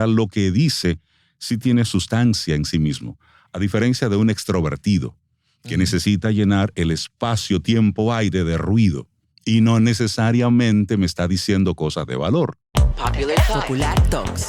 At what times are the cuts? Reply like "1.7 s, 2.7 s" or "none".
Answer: 12.6 s